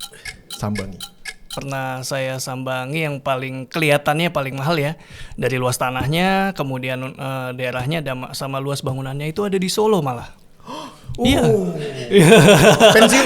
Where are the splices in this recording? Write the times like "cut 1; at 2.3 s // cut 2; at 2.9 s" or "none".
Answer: cut 1; at 1.5 s